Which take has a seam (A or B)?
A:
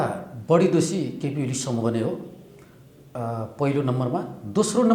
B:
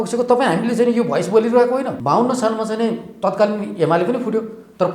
B